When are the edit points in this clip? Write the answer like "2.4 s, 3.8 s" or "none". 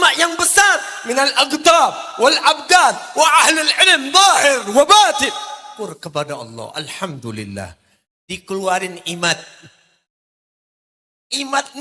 5.7 s